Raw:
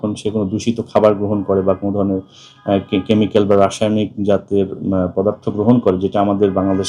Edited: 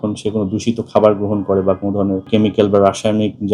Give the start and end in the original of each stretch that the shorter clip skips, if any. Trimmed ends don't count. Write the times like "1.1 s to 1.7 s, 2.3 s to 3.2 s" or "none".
2.3 s to 3.0 s